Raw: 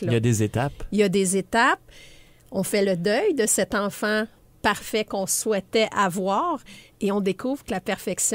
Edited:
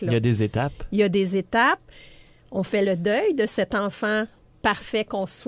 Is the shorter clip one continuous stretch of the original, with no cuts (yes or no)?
yes